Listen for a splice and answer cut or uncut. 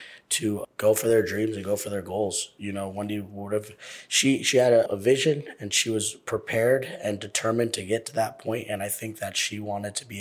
uncut